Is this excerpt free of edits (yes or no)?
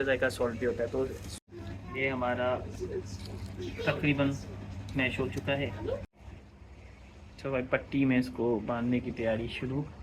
no